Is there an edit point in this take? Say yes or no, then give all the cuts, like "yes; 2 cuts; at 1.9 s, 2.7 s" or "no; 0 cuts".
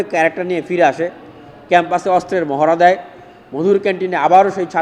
no; 0 cuts